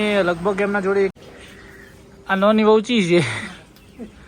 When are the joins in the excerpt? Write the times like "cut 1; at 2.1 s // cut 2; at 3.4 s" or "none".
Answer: cut 1; at 1.1 s